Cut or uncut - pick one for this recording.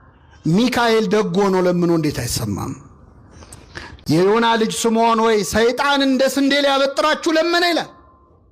uncut